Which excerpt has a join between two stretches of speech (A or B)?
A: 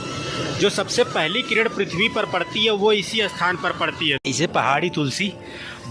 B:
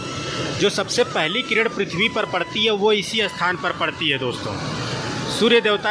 A